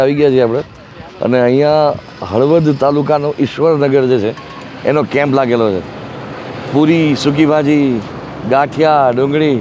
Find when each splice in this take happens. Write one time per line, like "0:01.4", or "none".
none